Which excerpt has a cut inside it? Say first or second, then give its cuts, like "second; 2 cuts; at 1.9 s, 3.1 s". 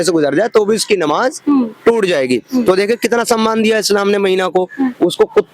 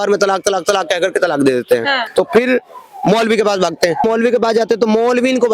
second; 1 cut; at 2.0 s